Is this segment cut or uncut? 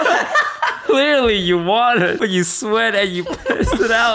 cut